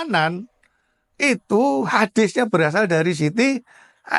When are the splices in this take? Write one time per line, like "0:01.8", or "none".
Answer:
none